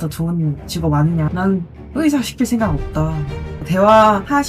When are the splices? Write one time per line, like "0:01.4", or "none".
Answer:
0:01.6

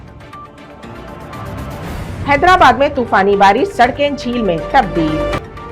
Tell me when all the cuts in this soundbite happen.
0:01.0

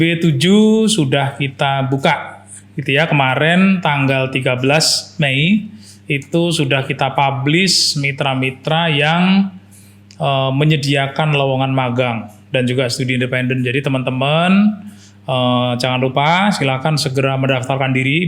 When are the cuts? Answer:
none

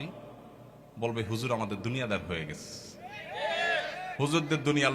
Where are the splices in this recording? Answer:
none

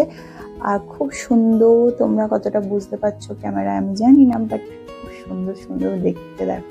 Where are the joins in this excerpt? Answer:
none

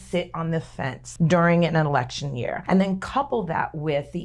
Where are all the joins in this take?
0:01.0
0:02.5

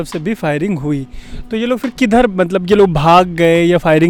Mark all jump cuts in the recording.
none

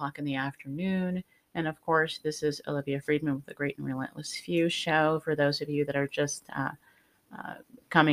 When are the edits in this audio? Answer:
none

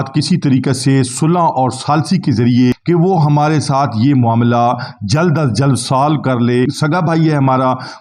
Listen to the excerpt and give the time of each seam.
0:02.7
0:06.7

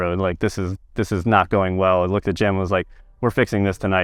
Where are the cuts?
none

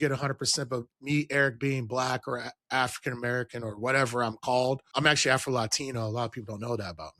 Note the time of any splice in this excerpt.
0:04.9

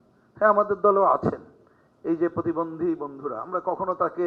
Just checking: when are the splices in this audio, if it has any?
none

